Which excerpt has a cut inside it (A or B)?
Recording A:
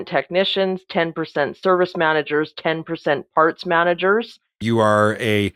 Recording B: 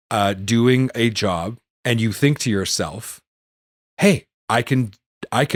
A